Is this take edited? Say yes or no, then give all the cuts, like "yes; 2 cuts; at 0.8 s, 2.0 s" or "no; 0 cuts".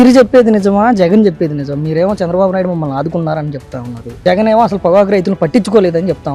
no; 0 cuts